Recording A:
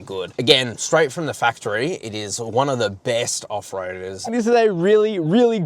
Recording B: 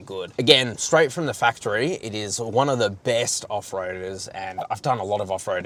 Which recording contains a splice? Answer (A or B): A